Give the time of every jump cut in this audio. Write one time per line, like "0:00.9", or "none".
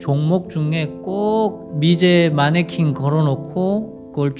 0:01.6